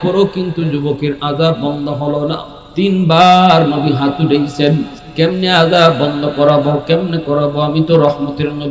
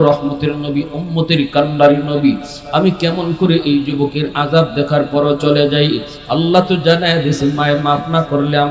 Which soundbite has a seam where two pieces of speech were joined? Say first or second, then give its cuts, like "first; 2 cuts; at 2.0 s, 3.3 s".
first; 1 cut; at 5.0 s